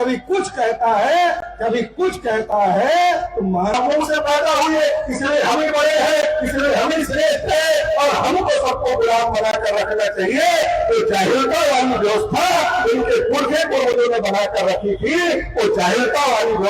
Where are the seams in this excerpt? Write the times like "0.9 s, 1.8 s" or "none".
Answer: 3.7 s